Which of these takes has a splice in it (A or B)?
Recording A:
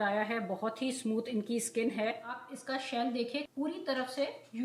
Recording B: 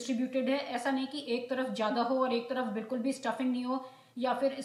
A